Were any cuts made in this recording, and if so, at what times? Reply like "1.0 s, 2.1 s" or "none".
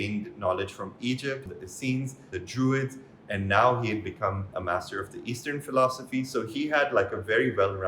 1.4 s, 2.3 s, 4.5 s